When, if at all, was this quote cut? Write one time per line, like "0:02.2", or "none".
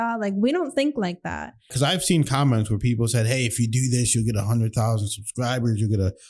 0:01.6